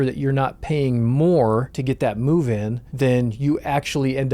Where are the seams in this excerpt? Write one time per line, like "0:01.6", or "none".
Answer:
0:01.7
0:02.8